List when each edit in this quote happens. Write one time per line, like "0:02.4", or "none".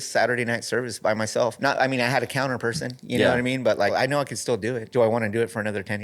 0:01.6
0:04.3